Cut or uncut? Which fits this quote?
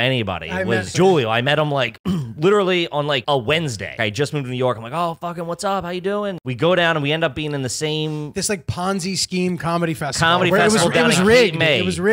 cut